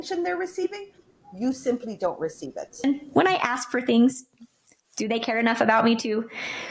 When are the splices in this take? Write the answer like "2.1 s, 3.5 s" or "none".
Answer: 2.8 s